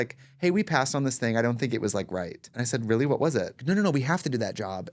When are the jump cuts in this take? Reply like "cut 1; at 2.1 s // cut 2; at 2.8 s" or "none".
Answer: cut 1; at 2.5 s // cut 2; at 3.6 s